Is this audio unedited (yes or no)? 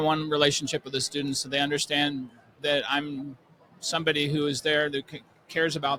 yes